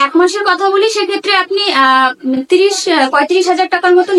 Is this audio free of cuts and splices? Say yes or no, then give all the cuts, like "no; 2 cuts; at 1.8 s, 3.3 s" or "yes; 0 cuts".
yes; 0 cuts